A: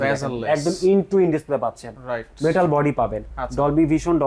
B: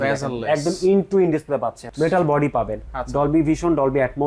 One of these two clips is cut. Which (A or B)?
B